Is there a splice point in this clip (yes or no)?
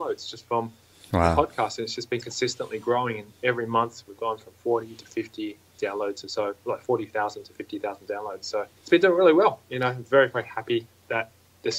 yes